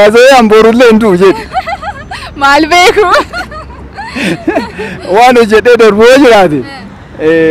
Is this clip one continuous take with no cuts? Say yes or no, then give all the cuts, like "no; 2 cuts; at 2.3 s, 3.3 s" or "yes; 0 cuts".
yes; 0 cuts